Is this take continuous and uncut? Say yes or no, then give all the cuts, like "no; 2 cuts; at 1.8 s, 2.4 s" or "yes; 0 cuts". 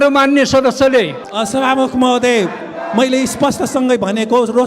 no; 1 cut; at 1.2 s